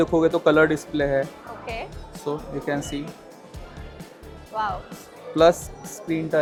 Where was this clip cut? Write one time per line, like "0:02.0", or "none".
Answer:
none